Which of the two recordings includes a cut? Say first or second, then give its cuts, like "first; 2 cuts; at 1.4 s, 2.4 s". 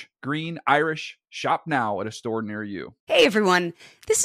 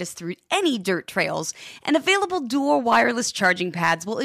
first; 1 cut; at 2.9 s